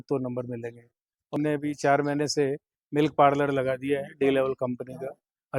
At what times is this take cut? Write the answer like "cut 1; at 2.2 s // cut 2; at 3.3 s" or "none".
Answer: cut 1; at 1.3 s

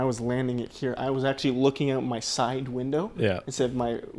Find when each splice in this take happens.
none

